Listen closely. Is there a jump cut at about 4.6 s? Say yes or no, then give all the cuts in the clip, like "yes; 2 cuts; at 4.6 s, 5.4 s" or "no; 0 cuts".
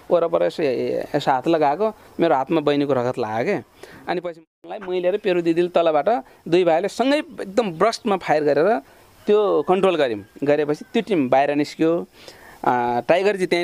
yes; 1 cut; at 4.6 s